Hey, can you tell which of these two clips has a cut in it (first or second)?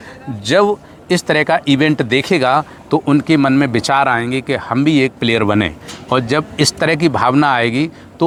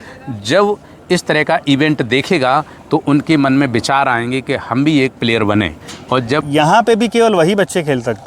second